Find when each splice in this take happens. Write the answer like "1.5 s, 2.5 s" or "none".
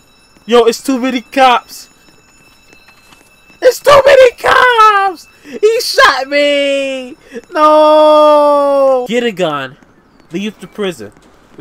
9.1 s